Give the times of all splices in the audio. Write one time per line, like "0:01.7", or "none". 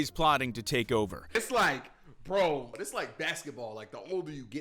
0:01.3